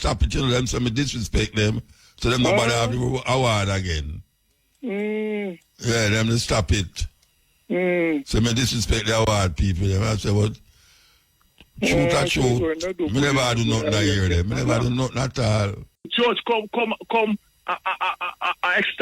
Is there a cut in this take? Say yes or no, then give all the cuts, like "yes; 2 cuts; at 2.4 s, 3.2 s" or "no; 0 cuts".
yes; 1 cut; at 16.1 s